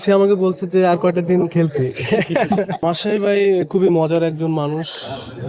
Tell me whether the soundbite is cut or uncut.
cut